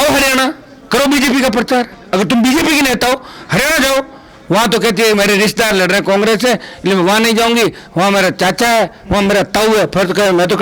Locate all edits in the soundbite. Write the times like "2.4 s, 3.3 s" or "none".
none